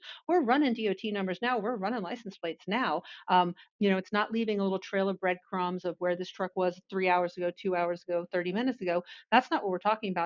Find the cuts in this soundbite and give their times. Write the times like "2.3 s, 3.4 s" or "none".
3.6 s